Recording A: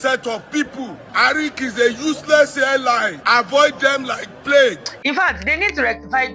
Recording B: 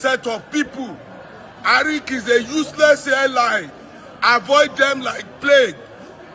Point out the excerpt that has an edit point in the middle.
A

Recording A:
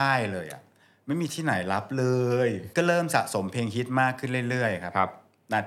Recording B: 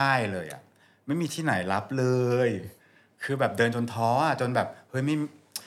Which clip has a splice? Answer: A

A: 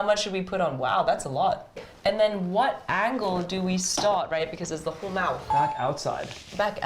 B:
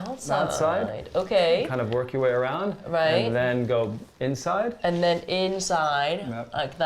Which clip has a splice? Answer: A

